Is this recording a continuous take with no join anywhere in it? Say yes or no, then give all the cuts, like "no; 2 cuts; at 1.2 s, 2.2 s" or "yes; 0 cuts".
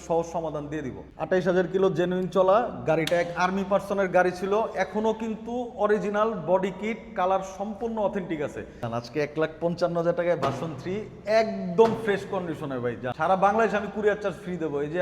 no; 3 cuts; at 1.0 s, 8.8 s, 13.1 s